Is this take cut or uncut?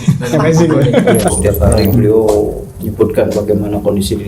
cut